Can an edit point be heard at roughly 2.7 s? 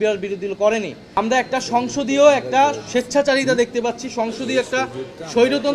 no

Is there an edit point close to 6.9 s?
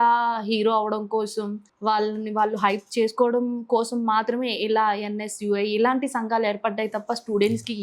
no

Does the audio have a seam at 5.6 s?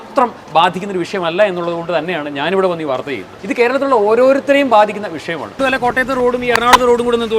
yes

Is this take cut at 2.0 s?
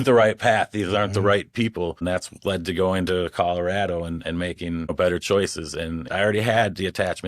yes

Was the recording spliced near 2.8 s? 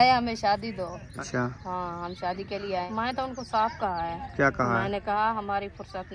yes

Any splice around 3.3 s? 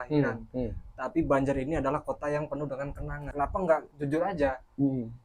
yes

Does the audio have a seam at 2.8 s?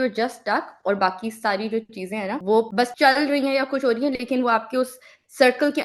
yes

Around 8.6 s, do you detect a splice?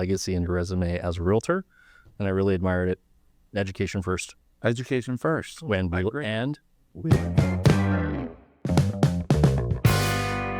no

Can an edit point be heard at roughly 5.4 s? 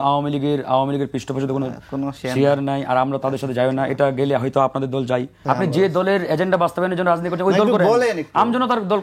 yes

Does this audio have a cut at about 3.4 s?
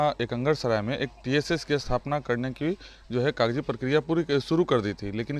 no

